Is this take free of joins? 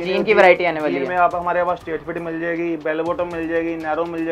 yes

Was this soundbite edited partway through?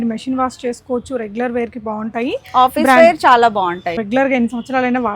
yes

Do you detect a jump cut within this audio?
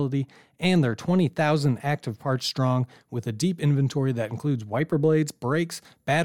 no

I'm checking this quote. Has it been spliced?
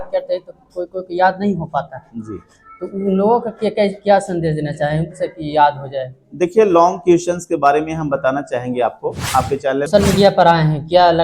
yes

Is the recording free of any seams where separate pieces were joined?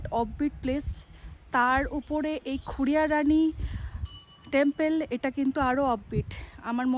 yes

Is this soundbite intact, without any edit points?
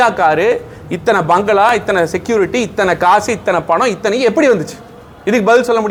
yes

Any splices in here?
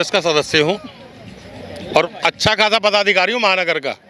no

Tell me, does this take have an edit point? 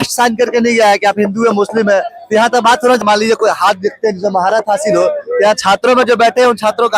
yes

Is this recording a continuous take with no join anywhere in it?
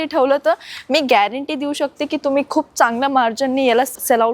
yes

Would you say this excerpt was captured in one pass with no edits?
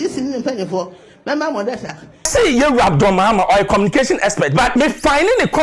no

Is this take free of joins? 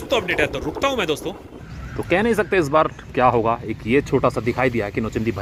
yes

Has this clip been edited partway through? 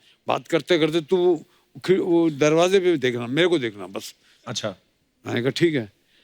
no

